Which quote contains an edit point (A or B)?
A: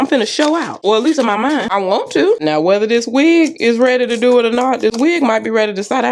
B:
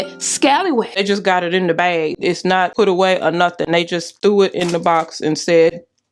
B